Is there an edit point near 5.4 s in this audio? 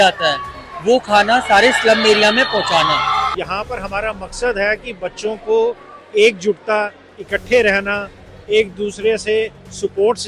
no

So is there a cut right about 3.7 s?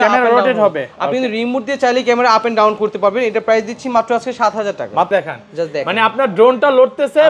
no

